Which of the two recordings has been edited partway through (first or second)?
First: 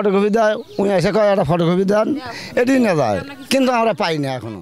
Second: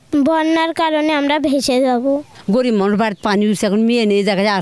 second